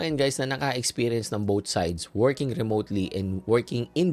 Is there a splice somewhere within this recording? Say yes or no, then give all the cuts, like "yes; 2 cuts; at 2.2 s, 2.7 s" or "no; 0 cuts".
no; 0 cuts